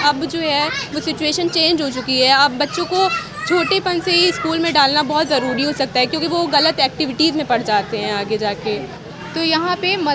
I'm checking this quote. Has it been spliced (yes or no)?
yes